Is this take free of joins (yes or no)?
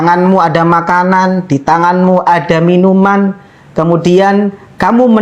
yes